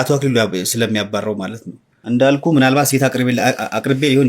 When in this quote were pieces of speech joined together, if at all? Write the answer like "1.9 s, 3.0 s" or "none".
2.2 s